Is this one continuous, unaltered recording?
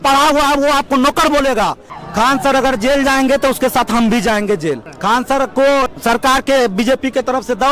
no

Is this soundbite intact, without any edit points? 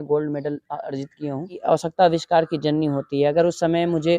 no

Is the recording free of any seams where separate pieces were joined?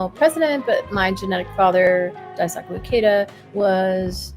no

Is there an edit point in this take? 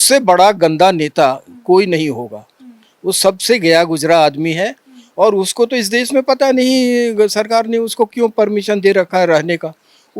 no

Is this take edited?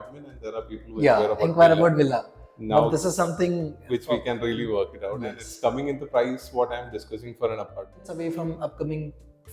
yes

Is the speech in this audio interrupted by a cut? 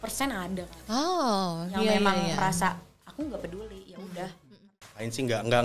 yes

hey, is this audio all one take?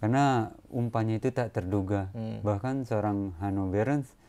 yes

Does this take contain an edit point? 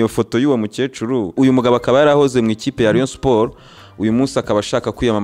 yes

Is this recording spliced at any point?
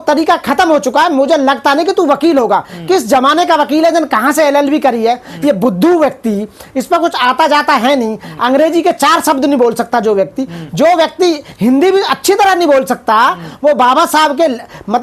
no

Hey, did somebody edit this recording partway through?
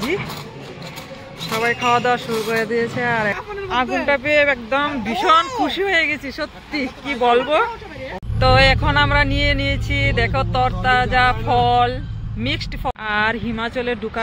yes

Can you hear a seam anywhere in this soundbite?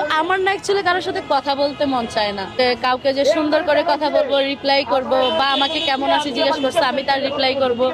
yes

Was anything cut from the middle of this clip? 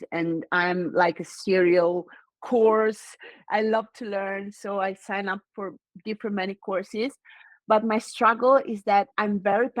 no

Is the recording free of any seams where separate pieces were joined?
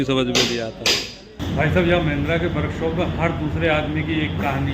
no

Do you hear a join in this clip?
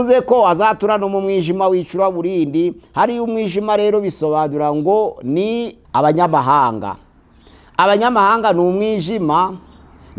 yes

